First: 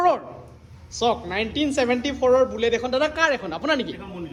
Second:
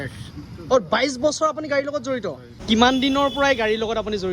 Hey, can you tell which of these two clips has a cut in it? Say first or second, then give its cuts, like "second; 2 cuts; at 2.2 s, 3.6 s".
second; 1 cut; at 2.6 s